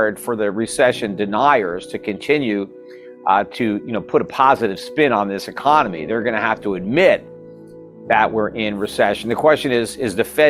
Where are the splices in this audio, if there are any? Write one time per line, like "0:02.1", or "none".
none